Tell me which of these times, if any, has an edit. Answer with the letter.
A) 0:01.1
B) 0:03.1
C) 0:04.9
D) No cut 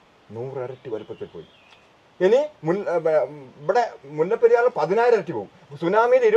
D